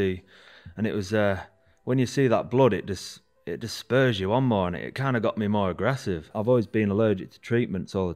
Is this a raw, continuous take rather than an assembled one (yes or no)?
no